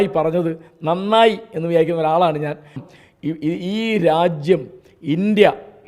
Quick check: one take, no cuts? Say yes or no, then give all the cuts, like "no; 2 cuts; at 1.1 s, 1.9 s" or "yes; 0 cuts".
no; 1 cut; at 2.8 s